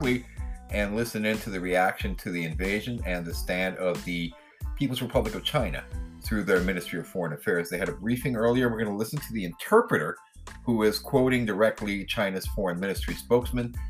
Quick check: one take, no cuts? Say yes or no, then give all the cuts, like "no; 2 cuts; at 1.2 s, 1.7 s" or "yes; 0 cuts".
yes; 0 cuts